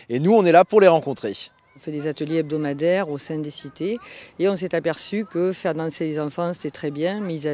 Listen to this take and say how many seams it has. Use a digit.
1